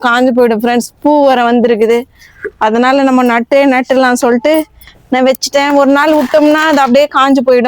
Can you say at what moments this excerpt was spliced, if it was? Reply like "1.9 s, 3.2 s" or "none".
none